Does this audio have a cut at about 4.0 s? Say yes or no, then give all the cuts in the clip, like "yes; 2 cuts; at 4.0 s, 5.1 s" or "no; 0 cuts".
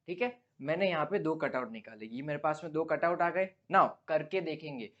yes; 1 cut; at 4.0 s